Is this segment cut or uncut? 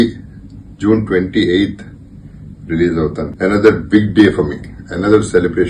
cut